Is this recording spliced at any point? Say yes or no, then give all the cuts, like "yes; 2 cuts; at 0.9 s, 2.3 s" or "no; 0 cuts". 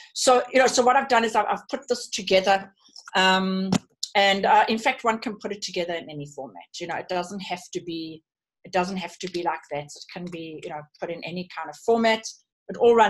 no; 0 cuts